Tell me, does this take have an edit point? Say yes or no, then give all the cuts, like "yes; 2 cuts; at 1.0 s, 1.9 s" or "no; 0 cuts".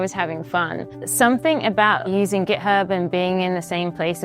yes; 2 cuts; at 1.0 s, 2.1 s